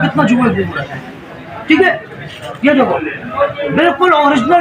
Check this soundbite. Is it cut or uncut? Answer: uncut